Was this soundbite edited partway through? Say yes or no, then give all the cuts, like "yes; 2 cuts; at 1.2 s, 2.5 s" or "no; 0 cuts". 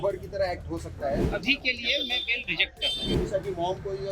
yes; 2 cuts; at 1.2 s, 3.1 s